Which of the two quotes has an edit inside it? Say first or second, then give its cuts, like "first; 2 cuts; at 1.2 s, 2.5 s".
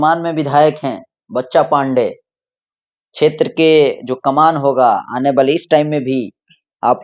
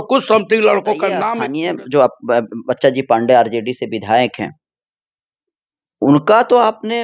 second; 1 cut; at 1.3 s